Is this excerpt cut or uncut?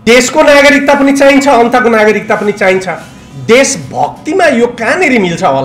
uncut